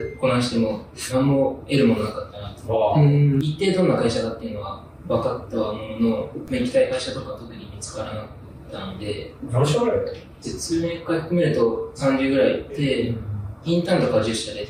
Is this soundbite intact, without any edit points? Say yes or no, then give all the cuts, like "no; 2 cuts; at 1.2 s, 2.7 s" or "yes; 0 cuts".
yes; 0 cuts